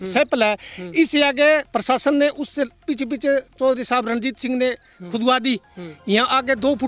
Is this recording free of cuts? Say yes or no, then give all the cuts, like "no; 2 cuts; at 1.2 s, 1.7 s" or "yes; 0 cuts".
yes; 0 cuts